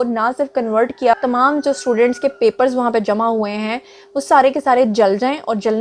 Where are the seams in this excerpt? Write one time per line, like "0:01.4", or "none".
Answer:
0:01.2

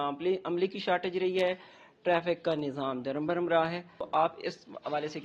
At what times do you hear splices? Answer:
0:04.1

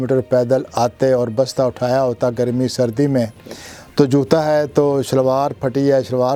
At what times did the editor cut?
none

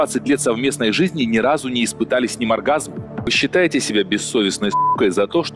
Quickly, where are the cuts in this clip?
0:03.3

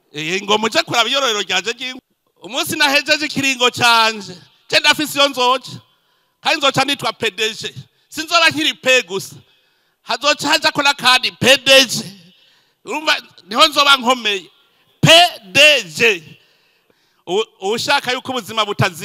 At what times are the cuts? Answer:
0:01.9
0:16.8

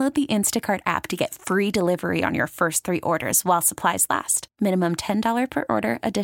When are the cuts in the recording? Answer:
none

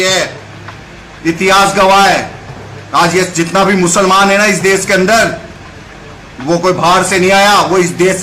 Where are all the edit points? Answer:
none

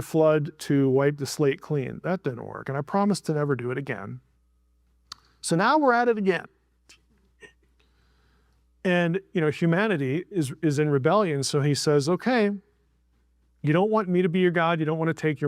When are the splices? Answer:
none

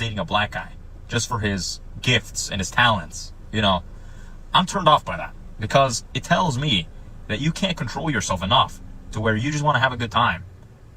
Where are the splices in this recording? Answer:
0:05.4

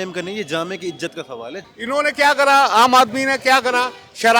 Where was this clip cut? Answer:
0:01.6

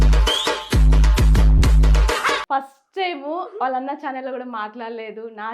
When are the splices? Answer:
0:02.4

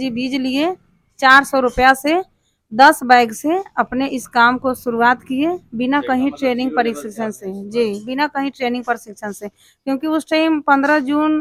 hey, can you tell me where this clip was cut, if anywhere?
none

